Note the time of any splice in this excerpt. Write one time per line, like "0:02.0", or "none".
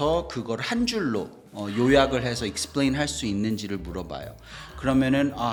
none

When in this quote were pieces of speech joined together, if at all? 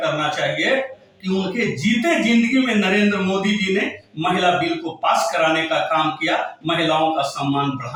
none

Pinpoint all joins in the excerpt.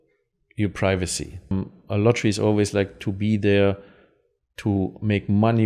0:01.5

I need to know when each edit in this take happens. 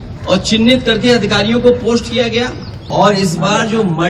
0:02.8

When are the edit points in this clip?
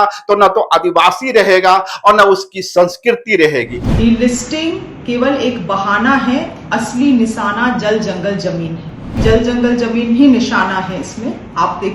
0:03.8
0:09.2

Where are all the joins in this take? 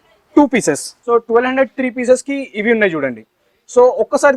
0:00.9

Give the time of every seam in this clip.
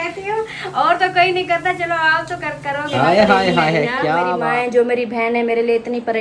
0:04.3

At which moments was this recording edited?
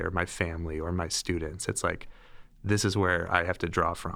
none

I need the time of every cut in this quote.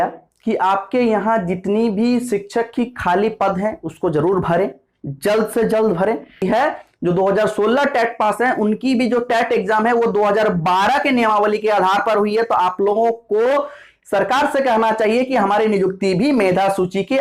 0:06.4

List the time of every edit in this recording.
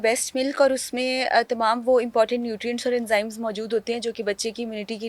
none

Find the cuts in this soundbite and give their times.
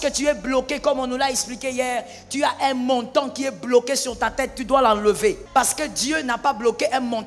0:05.4

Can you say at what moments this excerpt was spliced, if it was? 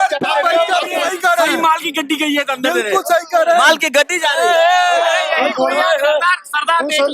0:01.0

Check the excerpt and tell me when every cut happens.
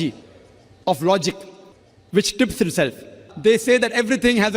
0:03.2

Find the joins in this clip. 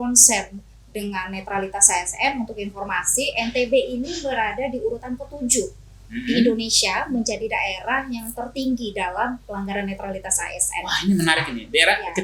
none

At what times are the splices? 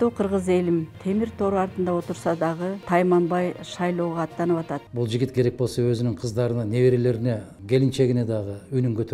0:00.9
0:02.8
0:04.9
0:07.5

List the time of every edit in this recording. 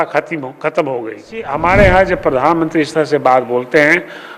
0:01.5

